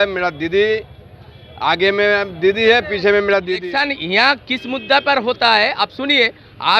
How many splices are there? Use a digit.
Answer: 1